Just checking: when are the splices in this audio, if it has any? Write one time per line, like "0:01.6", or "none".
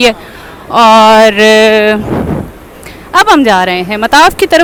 none